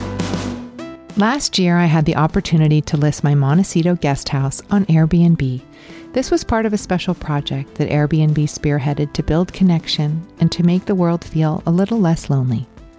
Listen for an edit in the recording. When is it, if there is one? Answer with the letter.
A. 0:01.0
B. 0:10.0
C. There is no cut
A